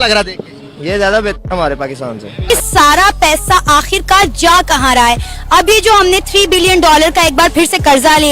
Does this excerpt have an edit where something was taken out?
yes; 1 cut; at 2.3 s

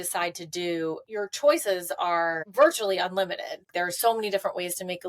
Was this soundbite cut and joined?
yes; 3 cuts; at 1.0 s, 2.4 s, 3.7 s

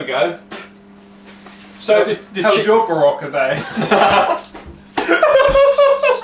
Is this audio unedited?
yes; 0 cuts

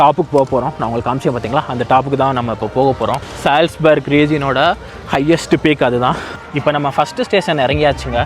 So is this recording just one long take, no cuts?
no; 2 cuts; at 3.3 s, 6.3 s

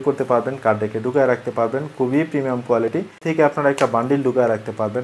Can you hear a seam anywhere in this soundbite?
yes; 1 cut; at 3.2 s

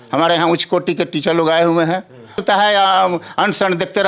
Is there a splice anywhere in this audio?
yes; 1 cut; at 2.4 s

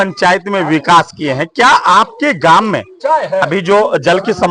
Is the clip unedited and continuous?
yes; 0 cuts

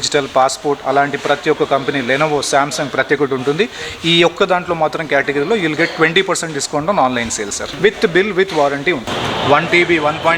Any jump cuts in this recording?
yes; 2 cuts; at 7.6 s, 9.0 s

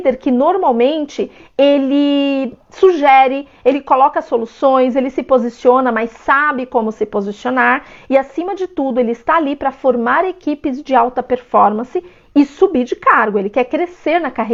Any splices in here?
no; 0 cuts

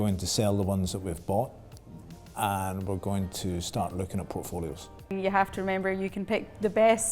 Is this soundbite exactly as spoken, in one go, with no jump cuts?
no; 1 cut; at 5.1 s

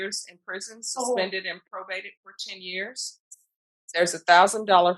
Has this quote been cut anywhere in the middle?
no; 0 cuts

